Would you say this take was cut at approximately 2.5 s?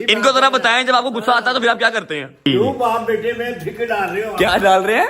yes; 1 cut; at 2.5 s

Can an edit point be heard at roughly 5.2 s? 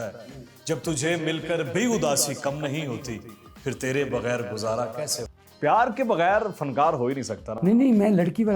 yes; 1 cut; at 5.2 s

